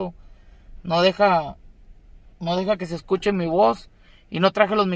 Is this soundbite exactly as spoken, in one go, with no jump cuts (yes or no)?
yes